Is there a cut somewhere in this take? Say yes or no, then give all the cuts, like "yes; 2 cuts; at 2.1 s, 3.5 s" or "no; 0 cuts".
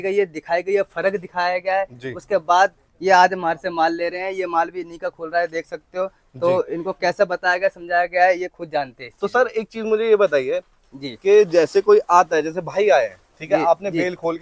no; 0 cuts